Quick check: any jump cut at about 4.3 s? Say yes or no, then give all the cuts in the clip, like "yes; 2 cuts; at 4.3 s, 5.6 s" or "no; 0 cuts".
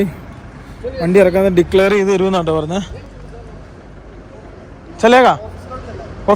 no; 0 cuts